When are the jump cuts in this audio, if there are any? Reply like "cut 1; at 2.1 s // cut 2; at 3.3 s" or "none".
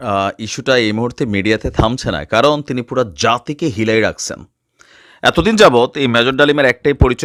none